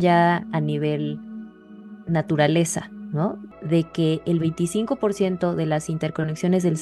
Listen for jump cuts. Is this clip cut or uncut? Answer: cut